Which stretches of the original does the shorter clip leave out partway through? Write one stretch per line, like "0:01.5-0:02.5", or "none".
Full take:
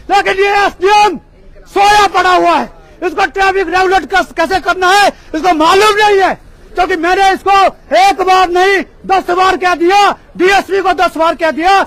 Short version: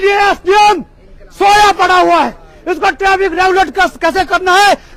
none